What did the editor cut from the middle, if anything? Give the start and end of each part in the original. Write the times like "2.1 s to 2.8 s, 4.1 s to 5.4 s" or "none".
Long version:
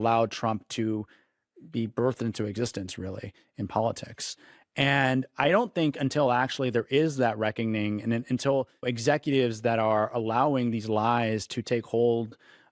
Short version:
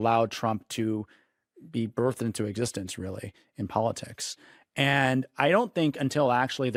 none